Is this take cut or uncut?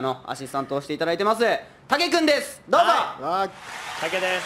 uncut